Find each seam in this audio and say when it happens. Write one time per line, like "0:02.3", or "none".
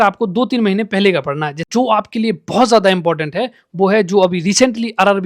0:01.7